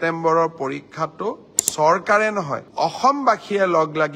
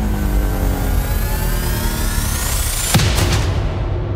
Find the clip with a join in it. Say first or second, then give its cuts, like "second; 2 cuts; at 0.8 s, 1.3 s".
first; 1 cut; at 2.6 s